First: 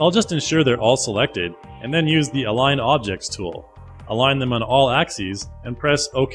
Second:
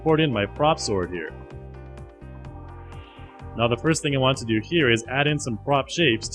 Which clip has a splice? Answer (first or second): first